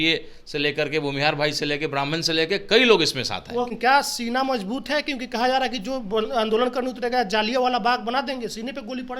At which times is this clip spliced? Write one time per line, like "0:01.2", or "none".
0:03.7